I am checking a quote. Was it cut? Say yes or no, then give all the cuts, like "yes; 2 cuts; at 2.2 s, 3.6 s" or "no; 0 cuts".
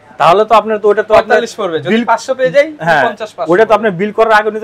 no; 0 cuts